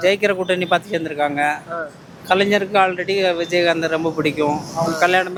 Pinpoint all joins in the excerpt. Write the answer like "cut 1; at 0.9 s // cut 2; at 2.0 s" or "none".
none